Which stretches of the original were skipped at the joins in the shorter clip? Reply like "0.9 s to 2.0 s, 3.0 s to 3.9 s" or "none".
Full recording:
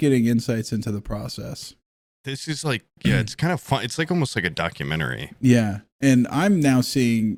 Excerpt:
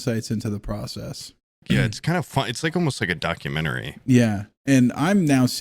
2.0 s to 2.9 s